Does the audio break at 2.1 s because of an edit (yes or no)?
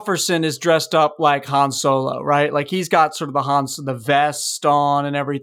no